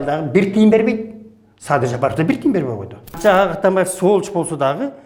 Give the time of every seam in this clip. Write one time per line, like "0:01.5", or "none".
0:03.2